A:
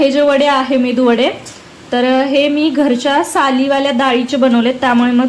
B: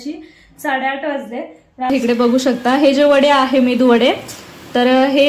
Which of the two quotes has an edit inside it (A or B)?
B